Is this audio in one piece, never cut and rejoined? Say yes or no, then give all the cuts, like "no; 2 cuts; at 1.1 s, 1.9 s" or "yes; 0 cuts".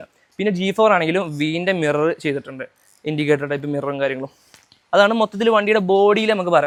yes; 0 cuts